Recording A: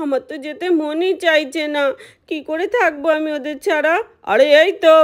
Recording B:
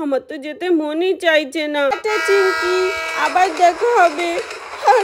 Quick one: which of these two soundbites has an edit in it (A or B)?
B